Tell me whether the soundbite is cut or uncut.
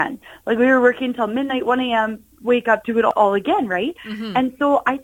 cut